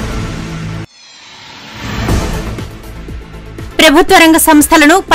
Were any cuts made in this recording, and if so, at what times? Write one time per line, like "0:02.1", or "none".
0:02.4
0:03.7